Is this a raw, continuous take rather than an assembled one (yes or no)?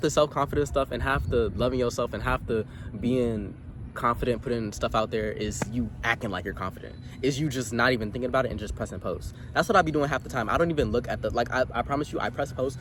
yes